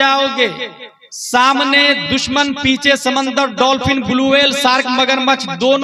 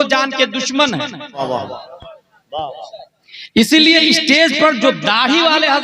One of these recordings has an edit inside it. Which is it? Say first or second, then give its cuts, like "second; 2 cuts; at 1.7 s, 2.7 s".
second; 1 cut; at 1.4 s